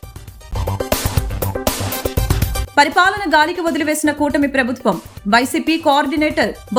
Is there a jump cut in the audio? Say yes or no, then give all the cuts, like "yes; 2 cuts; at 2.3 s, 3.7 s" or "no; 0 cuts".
no; 0 cuts